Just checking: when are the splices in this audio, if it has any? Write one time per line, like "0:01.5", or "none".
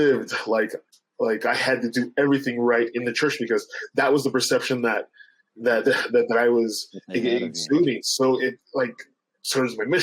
none

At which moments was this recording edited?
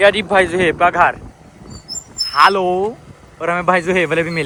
none

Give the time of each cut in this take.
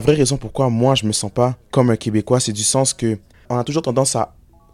0:03.3

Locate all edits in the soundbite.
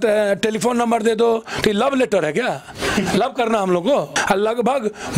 0:04.1

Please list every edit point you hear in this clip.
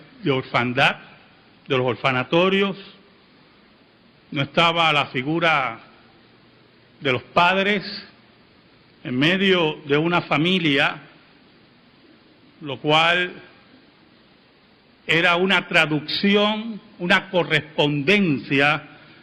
none

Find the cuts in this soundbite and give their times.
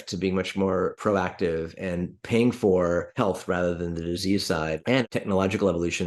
0:01.0
0:03.1
0:05.0

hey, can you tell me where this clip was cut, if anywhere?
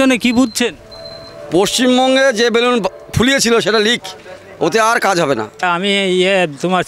0:05.5

